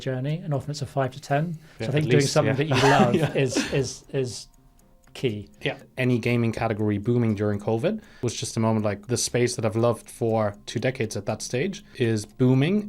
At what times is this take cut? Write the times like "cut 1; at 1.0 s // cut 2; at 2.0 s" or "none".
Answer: cut 1; at 5.9 s // cut 2; at 8.1 s // cut 3; at 9.0 s // cut 4; at 11.8 s